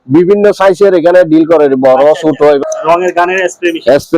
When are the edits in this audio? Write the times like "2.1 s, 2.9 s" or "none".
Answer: 2.6 s